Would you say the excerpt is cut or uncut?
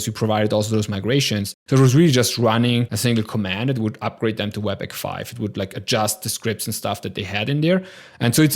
cut